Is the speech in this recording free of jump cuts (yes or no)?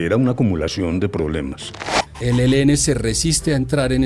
no